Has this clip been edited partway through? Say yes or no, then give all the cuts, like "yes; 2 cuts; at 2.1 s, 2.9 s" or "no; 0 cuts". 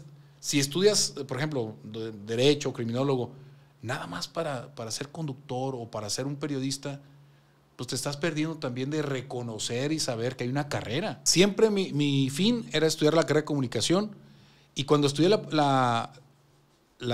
yes; 1 cut; at 11.2 s